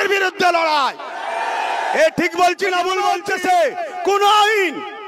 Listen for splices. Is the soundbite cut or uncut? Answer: cut